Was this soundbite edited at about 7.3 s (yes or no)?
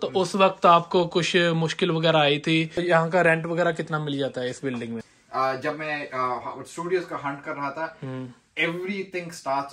no